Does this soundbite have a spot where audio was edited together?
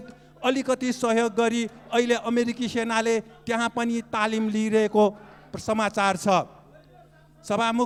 no; 0 cuts

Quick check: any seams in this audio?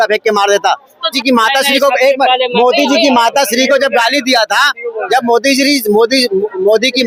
no; 0 cuts

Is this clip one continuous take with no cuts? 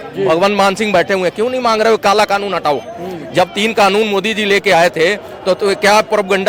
yes; 0 cuts

